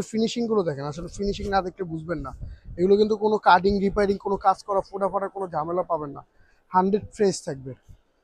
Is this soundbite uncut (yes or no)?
yes